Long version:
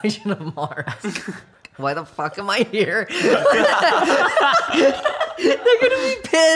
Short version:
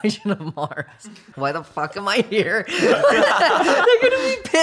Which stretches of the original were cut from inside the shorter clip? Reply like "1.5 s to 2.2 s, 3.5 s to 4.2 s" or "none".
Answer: 0.9 s to 1.3 s, 4.2 s to 5.6 s